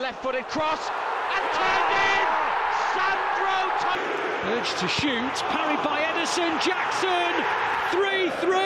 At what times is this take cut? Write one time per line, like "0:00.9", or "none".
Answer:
none